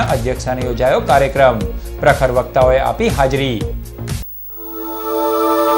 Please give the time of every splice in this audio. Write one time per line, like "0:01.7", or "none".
0:04.7